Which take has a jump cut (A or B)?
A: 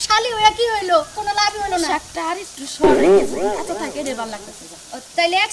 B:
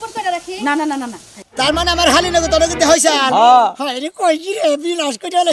B